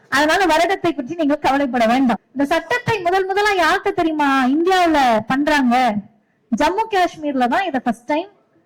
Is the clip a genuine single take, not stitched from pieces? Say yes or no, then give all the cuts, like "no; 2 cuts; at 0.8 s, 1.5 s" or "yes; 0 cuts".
no; 1 cut; at 2.3 s